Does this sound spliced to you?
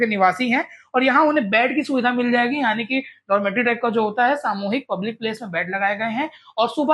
no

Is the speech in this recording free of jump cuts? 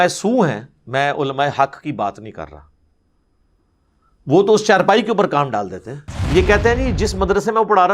no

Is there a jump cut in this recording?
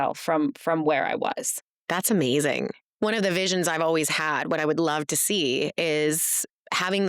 yes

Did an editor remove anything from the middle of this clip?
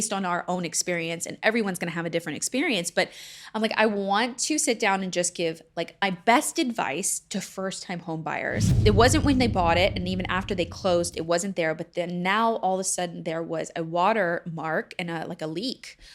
yes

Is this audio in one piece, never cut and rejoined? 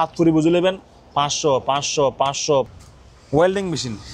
no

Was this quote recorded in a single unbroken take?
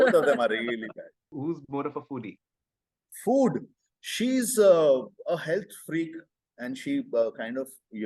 yes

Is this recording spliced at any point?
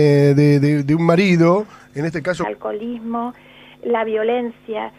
no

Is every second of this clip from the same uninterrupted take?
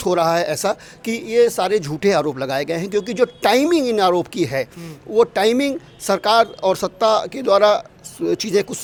yes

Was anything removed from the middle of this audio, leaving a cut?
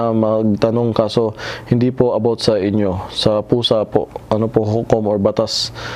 no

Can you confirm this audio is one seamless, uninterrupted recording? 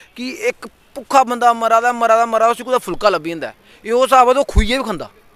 yes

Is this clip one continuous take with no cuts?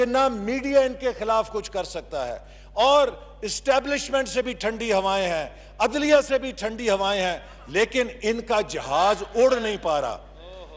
yes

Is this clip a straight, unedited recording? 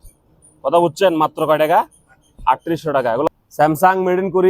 no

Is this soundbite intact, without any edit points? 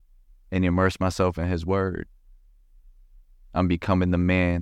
yes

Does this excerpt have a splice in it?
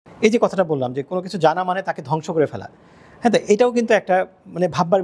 no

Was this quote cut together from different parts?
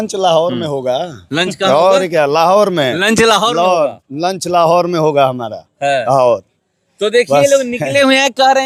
no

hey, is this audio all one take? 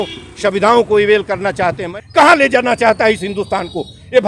no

